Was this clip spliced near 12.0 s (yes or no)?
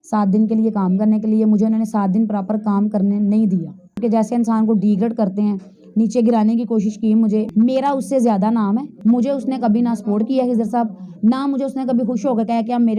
no